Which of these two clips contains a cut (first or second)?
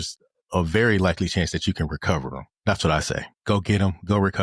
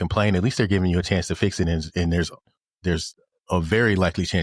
first